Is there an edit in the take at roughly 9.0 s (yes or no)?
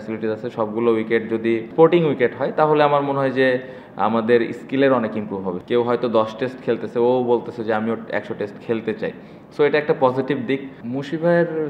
no